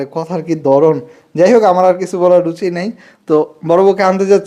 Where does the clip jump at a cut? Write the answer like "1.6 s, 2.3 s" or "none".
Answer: none